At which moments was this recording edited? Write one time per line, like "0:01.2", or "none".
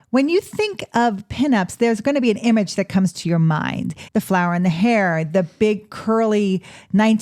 0:03.9